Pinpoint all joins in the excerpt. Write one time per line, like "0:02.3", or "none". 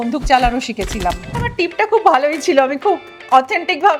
0:01.4